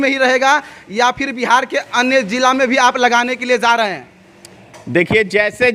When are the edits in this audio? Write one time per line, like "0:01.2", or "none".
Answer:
none